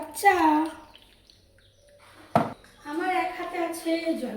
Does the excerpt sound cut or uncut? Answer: cut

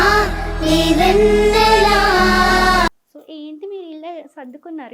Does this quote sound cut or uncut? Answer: cut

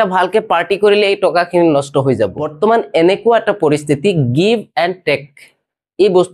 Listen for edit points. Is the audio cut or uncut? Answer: cut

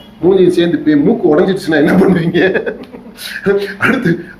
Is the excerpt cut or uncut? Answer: uncut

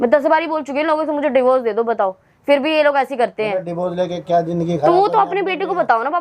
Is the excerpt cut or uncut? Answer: uncut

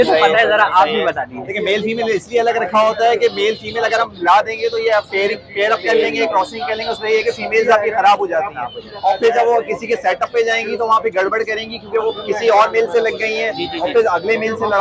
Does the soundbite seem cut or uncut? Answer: uncut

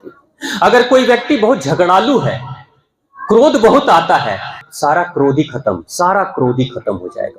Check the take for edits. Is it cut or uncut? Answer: cut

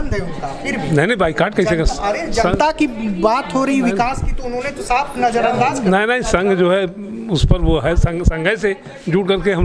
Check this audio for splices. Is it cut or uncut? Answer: uncut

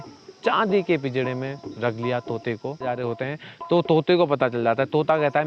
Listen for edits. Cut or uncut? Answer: cut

